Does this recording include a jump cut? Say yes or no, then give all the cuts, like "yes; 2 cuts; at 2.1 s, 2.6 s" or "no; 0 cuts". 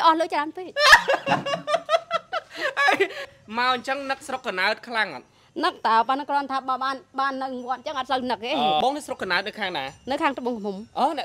yes; 2 cuts; at 3.4 s, 8.8 s